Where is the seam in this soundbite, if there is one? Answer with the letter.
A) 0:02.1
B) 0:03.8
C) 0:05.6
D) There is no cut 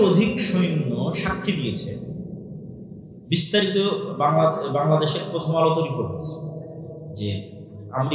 D